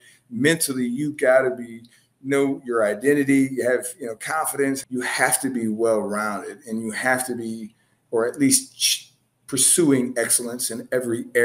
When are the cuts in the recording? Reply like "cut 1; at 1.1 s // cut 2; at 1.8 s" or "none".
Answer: cut 1; at 4.8 s